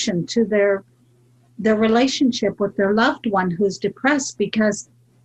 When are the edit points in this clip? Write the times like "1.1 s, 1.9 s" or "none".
none